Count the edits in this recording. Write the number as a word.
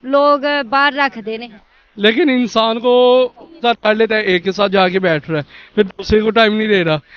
one